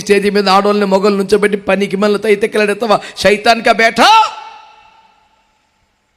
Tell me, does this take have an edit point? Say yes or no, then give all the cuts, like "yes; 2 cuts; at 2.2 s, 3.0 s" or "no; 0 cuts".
no; 0 cuts